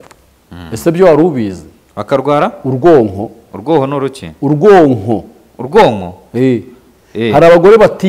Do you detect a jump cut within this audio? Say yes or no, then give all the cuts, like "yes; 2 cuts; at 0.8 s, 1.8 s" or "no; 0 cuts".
no; 0 cuts